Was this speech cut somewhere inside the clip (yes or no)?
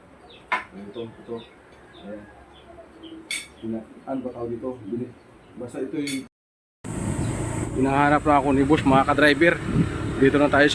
yes